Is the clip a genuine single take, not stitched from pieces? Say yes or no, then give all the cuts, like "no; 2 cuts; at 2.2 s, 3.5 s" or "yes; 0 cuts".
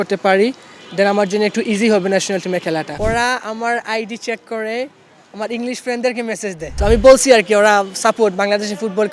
no; 2 cuts; at 2.9 s, 6.7 s